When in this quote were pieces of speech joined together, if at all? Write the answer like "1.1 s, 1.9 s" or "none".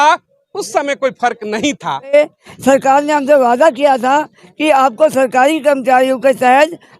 2.1 s